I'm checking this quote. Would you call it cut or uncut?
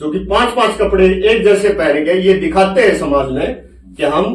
uncut